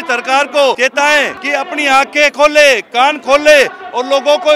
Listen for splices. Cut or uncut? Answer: cut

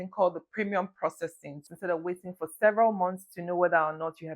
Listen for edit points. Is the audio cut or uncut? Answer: cut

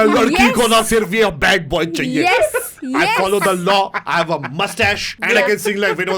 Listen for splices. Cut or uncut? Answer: cut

